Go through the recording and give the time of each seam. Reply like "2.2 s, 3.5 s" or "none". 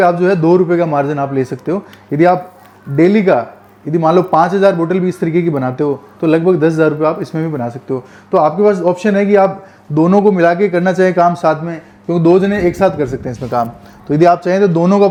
none